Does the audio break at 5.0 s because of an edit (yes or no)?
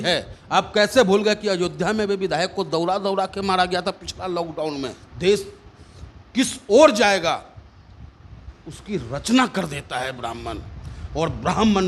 yes